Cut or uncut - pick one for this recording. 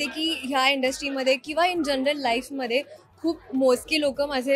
uncut